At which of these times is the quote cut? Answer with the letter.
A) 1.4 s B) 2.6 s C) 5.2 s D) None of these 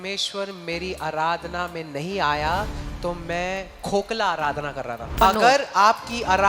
C